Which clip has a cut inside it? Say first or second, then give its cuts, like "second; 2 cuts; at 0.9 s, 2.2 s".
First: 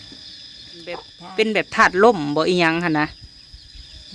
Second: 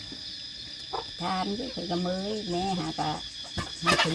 first; 1 cut; at 1.2 s